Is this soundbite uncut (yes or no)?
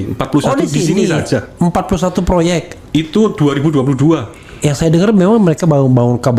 yes